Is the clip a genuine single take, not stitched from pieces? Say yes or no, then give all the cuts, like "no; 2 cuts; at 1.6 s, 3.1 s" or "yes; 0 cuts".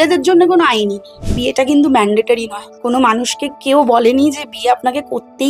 no; 1 cut; at 1.3 s